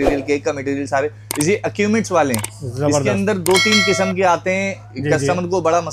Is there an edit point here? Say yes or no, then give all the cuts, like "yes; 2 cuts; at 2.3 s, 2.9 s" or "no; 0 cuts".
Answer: no; 0 cuts